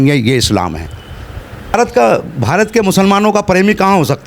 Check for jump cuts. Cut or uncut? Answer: cut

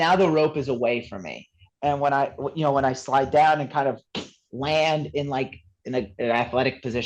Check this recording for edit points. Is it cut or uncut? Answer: cut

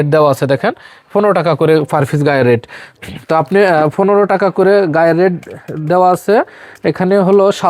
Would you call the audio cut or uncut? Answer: uncut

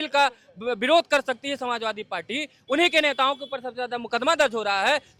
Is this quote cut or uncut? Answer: uncut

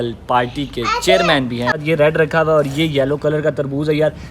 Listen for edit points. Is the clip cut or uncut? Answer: cut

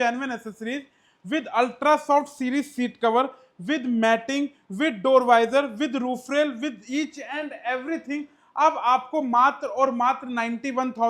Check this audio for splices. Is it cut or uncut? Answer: uncut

